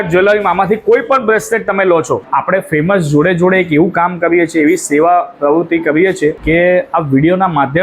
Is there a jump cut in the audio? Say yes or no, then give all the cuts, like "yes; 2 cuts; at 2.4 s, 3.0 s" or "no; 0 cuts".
yes; 2 cuts; at 2.2 s, 6.4 s